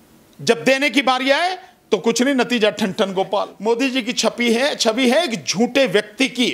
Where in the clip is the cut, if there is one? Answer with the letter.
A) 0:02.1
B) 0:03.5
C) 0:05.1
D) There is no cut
B